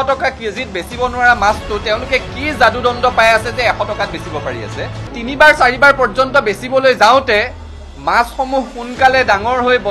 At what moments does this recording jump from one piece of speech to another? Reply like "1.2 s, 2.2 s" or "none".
5.2 s

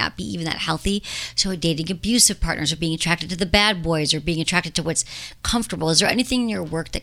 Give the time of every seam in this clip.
none

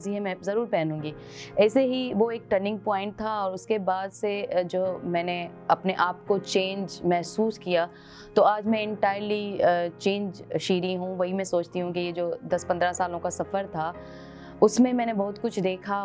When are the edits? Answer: none

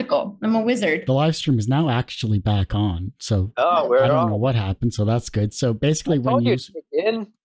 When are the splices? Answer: 1.0 s

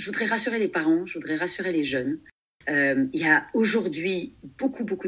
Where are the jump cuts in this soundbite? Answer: none

